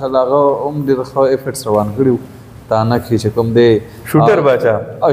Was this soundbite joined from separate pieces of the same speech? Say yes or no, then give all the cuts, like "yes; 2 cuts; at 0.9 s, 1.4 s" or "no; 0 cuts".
no; 0 cuts